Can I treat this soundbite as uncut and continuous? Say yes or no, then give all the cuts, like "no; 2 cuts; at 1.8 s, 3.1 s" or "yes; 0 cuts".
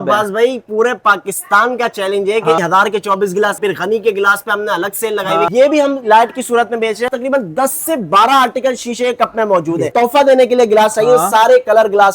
no; 5 cuts; at 2.6 s, 3.6 s, 5.5 s, 7.1 s, 9.9 s